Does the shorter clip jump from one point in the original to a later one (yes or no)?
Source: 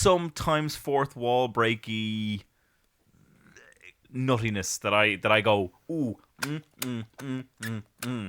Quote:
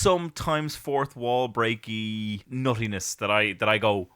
yes